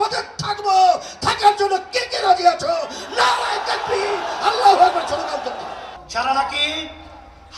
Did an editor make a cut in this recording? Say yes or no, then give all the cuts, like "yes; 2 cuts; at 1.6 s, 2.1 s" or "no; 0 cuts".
yes; 1 cut; at 5.9 s